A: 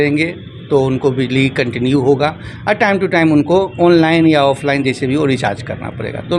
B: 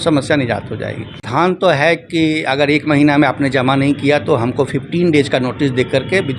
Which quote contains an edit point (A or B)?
B